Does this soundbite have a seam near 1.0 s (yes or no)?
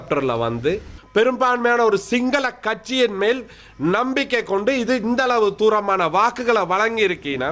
yes